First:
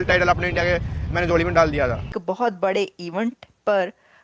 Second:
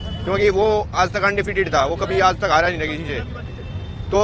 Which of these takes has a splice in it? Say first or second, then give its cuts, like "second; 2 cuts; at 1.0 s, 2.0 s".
first; 1 cut; at 2.2 s